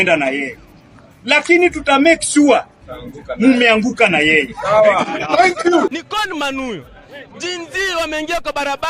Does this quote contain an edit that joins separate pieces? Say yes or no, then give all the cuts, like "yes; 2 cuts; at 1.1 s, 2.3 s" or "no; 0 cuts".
yes; 1 cut; at 6.0 s